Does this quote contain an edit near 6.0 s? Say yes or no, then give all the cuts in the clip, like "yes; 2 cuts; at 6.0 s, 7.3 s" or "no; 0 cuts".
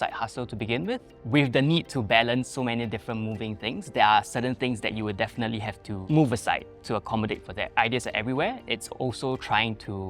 yes; 3 cuts; at 1.1 s, 6.0 s, 7.7 s